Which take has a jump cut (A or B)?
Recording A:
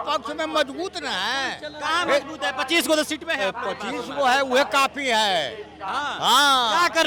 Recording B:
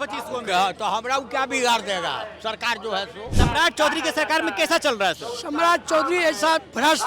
B